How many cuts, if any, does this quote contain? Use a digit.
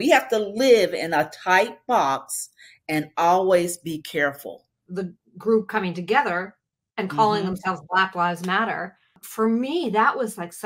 2